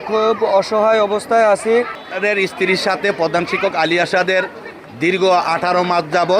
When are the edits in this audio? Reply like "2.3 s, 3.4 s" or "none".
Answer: 2.0 s